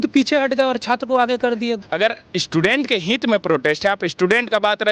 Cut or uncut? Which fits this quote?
cut